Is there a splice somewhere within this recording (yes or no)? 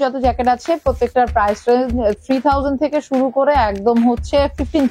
no